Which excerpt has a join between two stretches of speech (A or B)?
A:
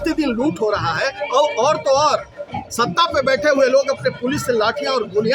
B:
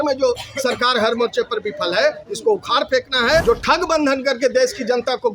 B